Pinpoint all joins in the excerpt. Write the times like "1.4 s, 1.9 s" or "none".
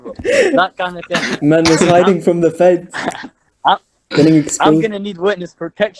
none

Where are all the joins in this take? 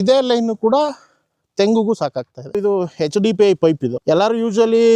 2.6 s

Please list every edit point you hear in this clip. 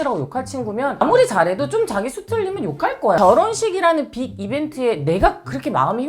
3.2 s

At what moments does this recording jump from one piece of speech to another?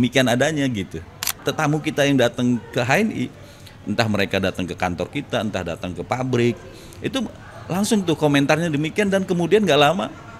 1.4 s

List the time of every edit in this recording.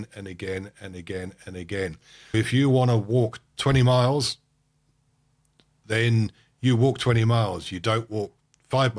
2.3 s

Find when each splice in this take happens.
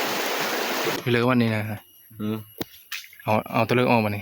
1.0 s

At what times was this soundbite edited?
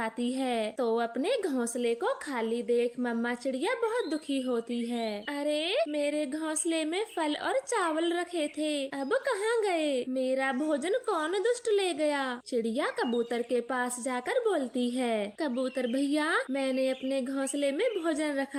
none

